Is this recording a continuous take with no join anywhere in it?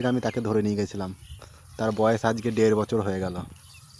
yes; 0 cuts

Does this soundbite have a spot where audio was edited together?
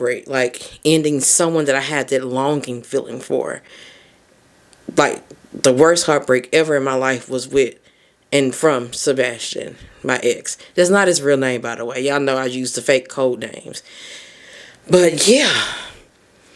no; 0 cuts

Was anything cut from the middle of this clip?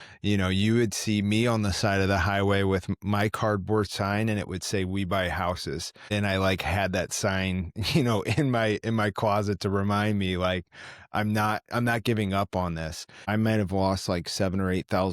yes; 2 cuts; at 6.1 s, 13.2 s

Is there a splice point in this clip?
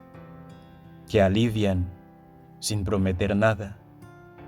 yes; 1 cut; at 1.1 s

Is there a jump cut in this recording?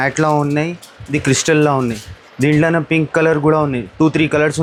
no; 0 cuts

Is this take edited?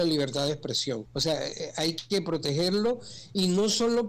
yes; 1 cut; at 1.1 s

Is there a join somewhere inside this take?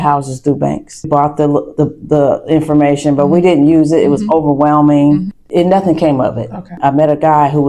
yes; 3 cuts; at 1.1 s, 5.4 s, 6.8 s

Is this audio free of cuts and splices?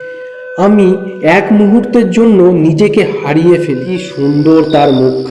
no; 1 cut; at 4.0 s

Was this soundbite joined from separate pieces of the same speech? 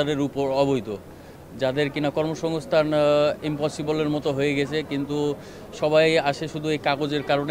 no; 0 cuts

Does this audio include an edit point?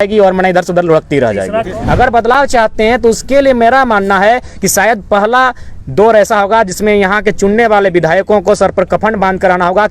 yes; 1 cut; at 1.7 s

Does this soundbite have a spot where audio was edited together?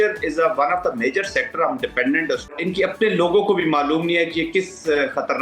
yes; 1 cut; at 2.6 s

